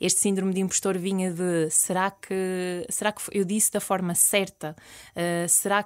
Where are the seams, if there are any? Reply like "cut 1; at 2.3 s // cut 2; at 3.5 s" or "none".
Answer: none